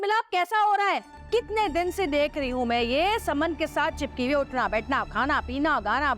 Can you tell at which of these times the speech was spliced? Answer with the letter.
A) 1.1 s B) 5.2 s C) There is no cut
A